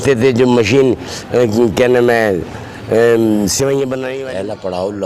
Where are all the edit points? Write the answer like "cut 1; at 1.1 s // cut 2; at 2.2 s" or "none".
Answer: cut 1; at 4.1 s